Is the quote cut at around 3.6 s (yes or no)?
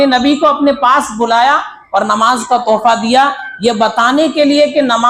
no